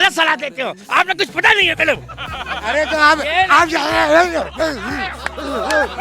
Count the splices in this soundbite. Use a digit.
1